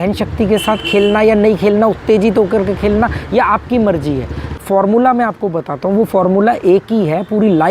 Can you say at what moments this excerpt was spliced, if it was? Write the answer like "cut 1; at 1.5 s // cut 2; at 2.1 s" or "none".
cut 1; at 4.6 s